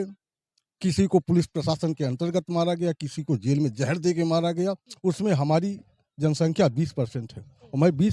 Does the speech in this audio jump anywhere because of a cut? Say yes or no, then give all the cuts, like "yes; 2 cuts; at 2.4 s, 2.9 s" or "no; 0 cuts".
yes; 1 cut; at 4.9 s